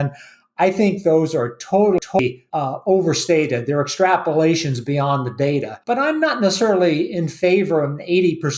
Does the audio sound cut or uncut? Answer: cut